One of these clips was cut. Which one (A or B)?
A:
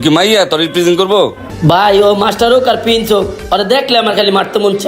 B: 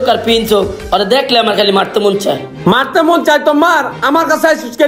A